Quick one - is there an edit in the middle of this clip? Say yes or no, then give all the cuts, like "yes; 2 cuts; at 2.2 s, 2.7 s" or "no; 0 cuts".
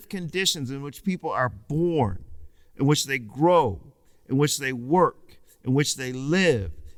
no; 0 cuts